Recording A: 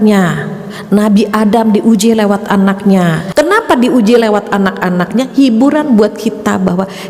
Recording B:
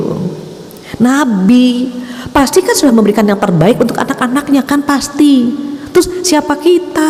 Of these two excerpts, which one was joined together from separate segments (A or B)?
A